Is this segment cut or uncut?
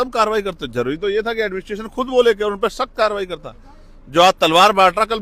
uncut